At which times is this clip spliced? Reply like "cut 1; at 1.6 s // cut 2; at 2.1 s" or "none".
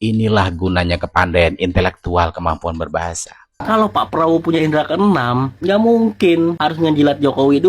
cut 1; at 3.6 s